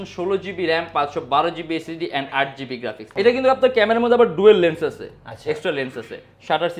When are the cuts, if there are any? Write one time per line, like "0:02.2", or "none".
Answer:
0:03.0